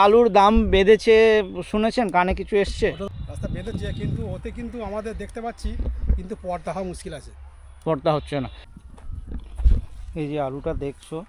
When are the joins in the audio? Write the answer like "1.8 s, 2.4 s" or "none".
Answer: 3.0 s, 8.6 s